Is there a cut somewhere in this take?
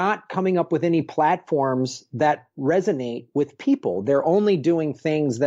no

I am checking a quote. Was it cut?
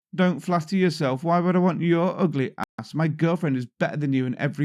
no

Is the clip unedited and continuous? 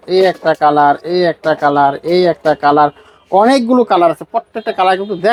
yes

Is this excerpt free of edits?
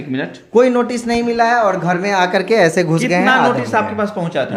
yes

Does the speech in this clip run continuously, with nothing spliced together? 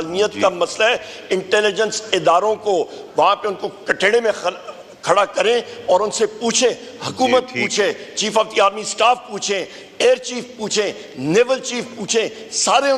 yes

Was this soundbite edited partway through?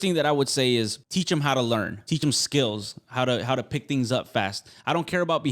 yes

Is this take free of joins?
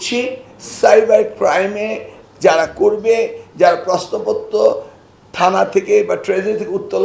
yes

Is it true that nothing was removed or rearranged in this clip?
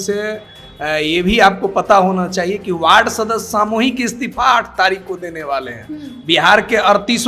yes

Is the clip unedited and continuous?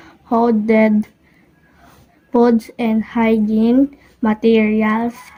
yes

